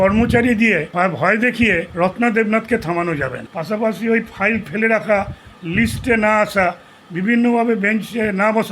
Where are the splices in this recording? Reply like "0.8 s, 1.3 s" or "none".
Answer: 0.9 s, 1.9 s, 3.5 s